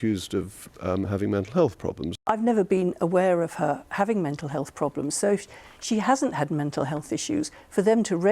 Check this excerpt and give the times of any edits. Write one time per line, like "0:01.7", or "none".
0:02.0

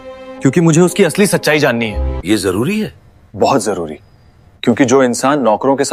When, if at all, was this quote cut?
none

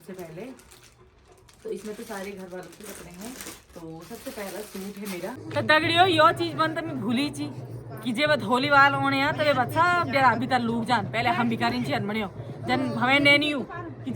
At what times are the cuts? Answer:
0:05.4

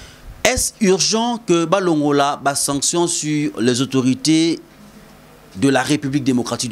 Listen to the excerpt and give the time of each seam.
none

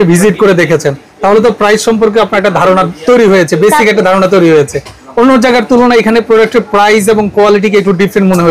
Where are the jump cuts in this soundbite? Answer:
none

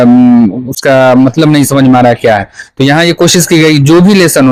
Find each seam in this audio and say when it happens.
none

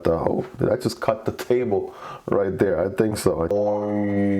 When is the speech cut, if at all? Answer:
0:03.4

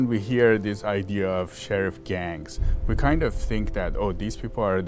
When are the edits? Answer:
none

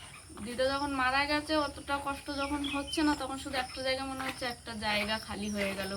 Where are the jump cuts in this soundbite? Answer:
none

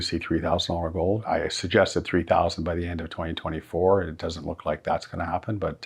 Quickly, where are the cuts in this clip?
0:01.2

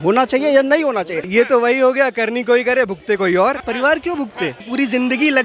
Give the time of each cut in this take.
0:01.3
0:03.6
0:04.7

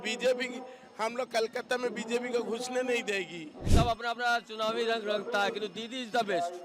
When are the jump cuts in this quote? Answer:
0:03.7

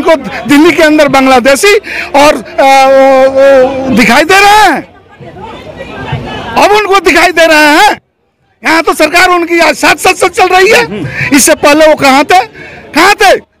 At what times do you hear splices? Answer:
none

